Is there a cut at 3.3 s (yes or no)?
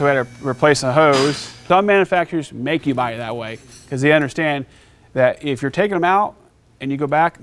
no